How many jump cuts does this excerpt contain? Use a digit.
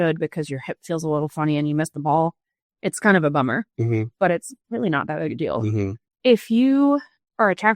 1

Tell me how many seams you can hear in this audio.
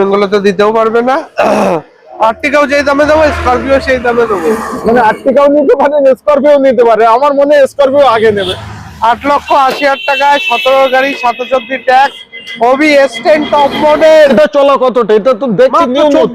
2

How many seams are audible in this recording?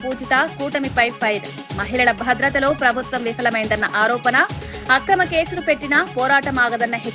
0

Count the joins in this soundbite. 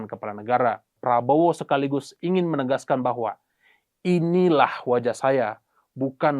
1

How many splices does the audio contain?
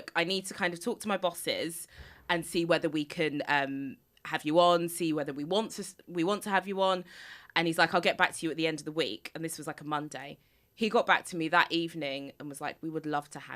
0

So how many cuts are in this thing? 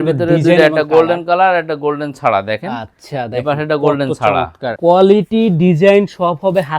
1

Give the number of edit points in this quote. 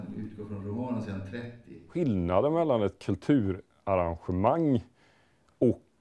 1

